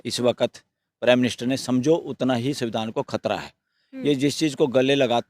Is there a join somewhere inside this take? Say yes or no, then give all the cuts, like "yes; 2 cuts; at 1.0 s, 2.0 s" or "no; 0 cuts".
no; 0 cuts